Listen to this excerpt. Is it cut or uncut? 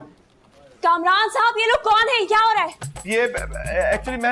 cut